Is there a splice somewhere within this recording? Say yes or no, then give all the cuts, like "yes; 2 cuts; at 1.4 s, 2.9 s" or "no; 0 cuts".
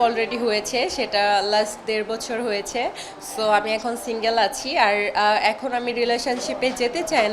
no; 0 cuts